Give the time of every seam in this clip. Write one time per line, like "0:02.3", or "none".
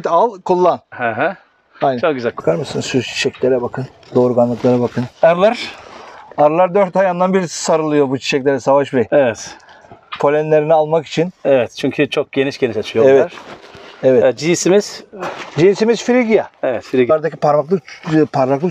0:02.4
0:17.1